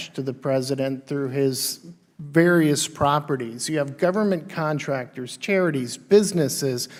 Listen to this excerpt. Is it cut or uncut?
uncut